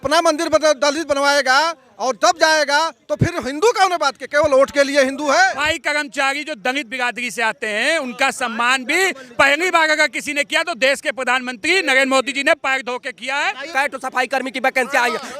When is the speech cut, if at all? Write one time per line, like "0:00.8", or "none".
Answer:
0:05.7
0:13.7